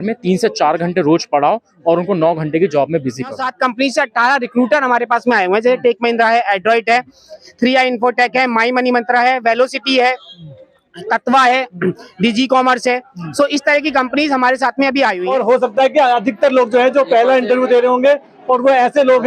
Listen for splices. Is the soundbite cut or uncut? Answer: cut